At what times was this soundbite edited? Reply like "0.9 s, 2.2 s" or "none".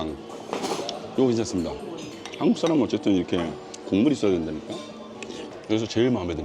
5.5 s